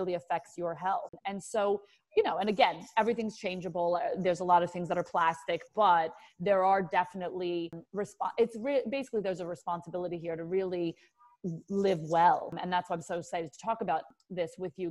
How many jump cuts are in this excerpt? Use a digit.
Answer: 4